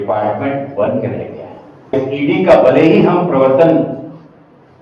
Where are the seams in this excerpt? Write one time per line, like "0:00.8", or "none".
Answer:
0:01.9